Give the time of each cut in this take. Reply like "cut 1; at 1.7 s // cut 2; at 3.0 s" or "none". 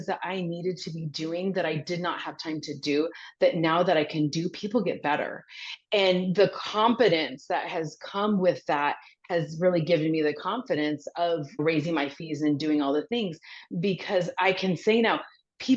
none